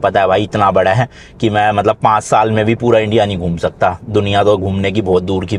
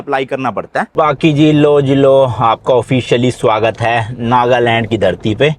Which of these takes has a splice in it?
second; 1 cut; at 0.9 s

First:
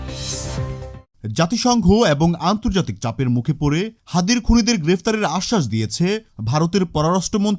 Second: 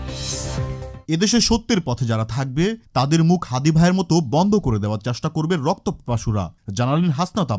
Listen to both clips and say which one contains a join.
first; 1 cut; at 1.1 s

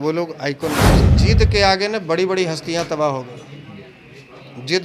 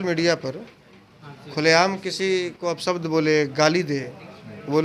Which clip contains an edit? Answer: first; 1 cut; at 1.1 s

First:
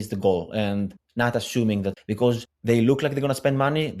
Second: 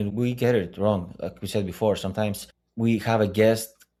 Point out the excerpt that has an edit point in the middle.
first; 2 cuts; at 1.0 s, 2.0 s

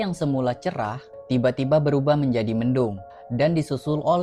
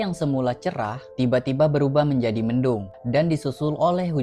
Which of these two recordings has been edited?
second; 2 cuts; at 1.0 s, 2.9 s

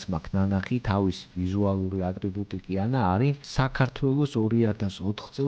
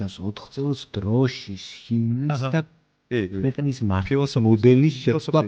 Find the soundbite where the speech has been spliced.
first; 1 cut; at 3.4 s

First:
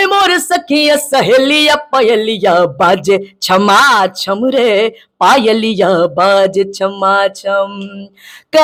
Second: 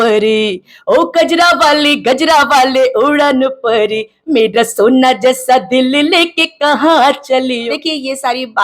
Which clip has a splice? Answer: second; 1 cut; at 7.7 s

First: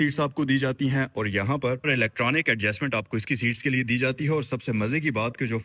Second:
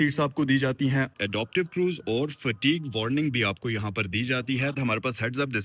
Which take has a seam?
second; 2 cuts; at 1.1 s, 4.7 s

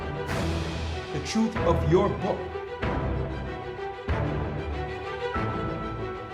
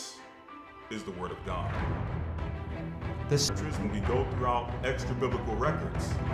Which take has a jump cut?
second; 1 cut; at 3.5 s

